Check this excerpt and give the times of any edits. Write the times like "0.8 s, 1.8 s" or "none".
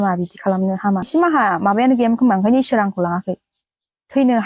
1.1 s